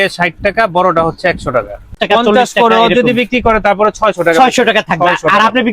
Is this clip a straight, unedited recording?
no; 1 cut; at 2.0 s

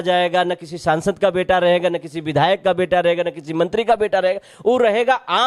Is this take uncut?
yes; 0 cuts

